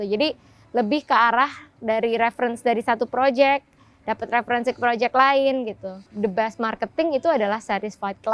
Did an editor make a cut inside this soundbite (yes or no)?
yes